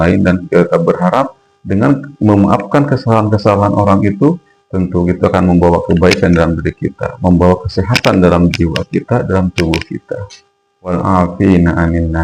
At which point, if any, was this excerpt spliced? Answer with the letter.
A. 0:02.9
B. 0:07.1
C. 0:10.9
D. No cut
C